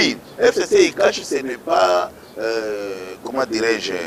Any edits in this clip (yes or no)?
no